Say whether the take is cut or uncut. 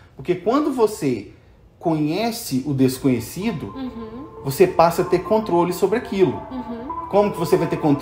uncut